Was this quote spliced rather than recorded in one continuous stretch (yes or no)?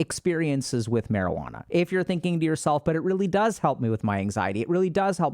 yes